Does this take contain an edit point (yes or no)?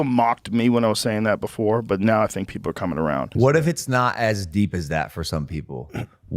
yes